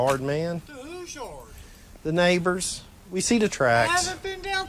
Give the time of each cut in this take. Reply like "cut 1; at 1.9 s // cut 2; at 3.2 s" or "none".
none